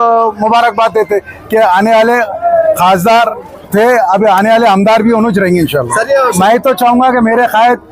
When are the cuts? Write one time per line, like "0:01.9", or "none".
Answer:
0:06.4